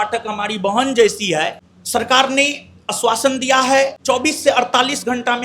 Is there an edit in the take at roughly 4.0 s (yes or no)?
yes